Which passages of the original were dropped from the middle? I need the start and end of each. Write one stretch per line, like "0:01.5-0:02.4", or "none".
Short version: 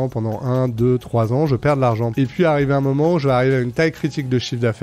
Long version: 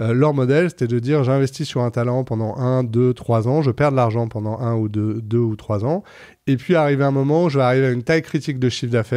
0:04.3-0:06.4